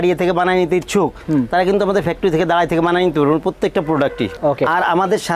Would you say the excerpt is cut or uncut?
cut